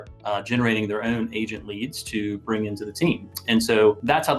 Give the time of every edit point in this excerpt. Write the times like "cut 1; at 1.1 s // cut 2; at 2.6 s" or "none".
none